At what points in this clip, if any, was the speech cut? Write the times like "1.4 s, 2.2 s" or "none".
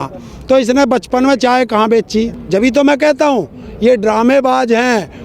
2.4 s